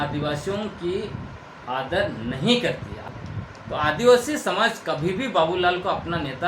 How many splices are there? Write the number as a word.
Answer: one